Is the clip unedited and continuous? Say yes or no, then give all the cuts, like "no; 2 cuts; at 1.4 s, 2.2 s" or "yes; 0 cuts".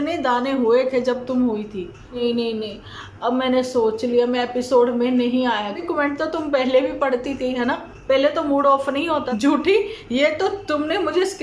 no; 3 cuts; at 2.2 s, 5.8 s, 9.3 s